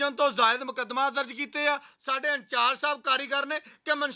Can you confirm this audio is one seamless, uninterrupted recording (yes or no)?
no